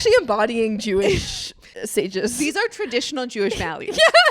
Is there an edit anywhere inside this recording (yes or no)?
yes